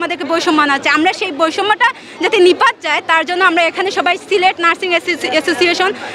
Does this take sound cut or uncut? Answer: uncut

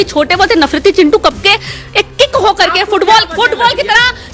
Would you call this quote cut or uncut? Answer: uncut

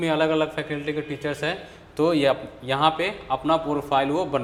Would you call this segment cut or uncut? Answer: uncut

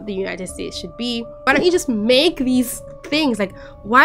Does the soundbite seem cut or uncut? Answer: cut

